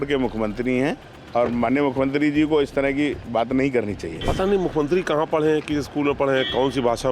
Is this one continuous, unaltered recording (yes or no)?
no